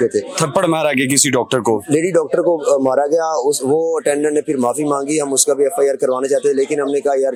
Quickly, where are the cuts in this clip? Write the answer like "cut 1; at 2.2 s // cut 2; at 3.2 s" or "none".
none